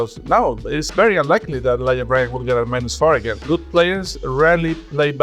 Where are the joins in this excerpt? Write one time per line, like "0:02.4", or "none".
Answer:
0:03.4